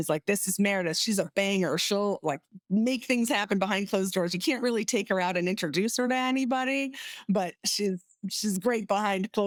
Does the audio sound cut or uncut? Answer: uncut